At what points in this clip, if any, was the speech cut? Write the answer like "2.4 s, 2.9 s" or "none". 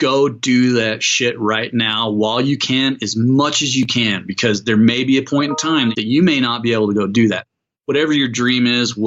5.9 s, 7.5 s